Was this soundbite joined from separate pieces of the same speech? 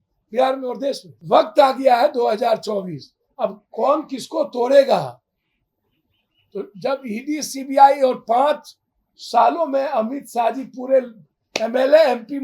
yes; 1 cut; at 1.1 s

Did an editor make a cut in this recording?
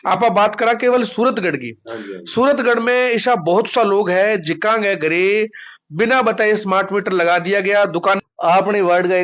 yes; 1 cut; at 8.2 s

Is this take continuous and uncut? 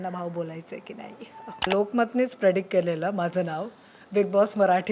no; 1 cut; at 1.7 s

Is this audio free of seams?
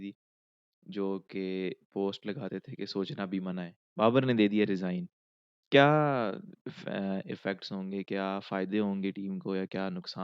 no; 1 cut; at 3.8 s

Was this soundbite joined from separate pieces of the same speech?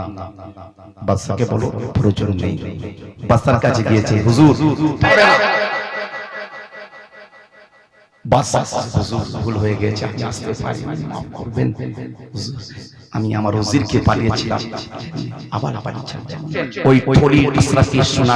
yes; 2 cuts; at 5.0 s, 16.6 s

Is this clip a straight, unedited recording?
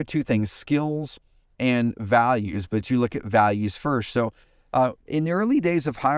yes; 0 cuts

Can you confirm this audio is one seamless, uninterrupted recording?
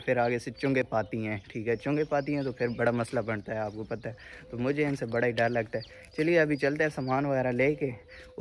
yes; 0 cuts

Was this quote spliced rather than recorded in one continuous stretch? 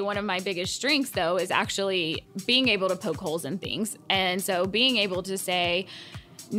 yes; 1 cut; at 2.3 s

